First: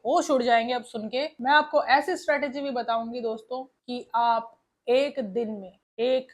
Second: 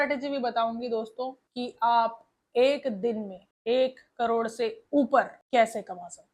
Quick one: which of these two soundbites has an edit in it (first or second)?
first